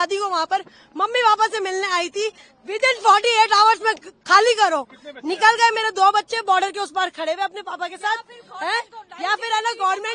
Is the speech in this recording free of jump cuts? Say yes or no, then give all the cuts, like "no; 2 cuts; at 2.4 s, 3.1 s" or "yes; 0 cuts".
yes; 0 cuts